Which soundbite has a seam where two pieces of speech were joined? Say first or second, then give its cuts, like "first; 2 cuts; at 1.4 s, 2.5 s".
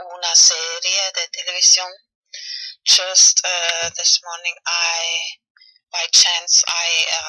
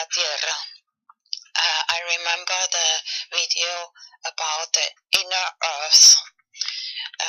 second; 1 cut; at 1.5 s